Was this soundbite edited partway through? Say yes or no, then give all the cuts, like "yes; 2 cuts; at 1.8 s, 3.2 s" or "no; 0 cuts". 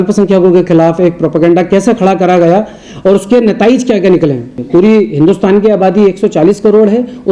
yes; 1 cut; at 4.5 s